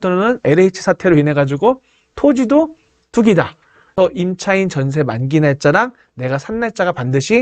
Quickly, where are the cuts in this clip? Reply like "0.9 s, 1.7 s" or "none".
4.0 s